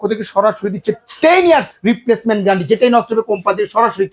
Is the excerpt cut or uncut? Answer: cut